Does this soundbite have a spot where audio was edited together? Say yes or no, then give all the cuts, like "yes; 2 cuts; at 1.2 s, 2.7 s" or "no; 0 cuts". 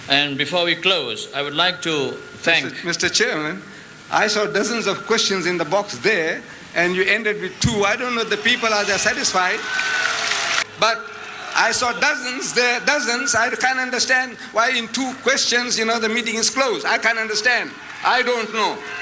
yes; 1 cut; at 10.6 s